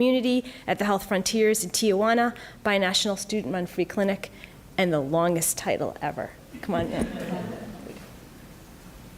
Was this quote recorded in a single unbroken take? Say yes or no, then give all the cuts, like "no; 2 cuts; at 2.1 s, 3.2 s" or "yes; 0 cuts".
yes; 0 cuts